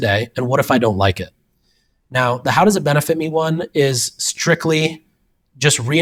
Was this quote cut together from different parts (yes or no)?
no